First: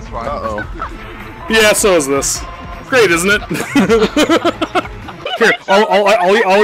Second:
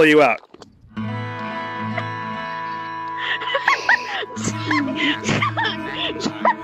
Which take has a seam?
first; 1 cut; at 5.3 s

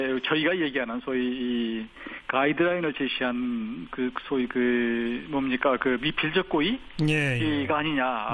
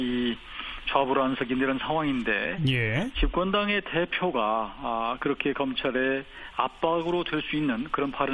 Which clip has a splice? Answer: first; 1 cut; at 1.9 s

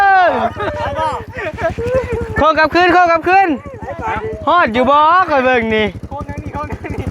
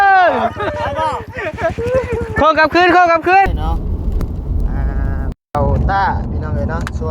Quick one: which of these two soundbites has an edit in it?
second; 1 cut; at 3.5 s

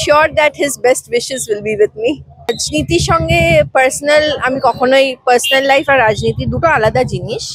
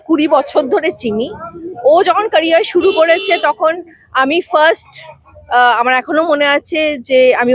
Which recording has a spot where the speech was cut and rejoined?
first; 1 cut; at 2.5 s

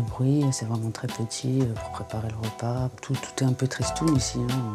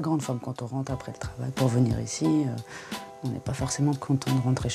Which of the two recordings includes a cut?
first; 1 cut; at 3.0 s

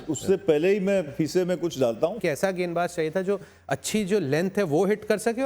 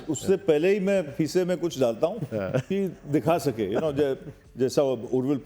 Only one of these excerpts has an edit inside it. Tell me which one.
first; 1 cut; at 2.2 s

